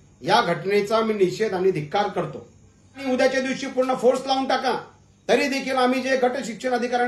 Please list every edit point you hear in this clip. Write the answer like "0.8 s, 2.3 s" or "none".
3.0 s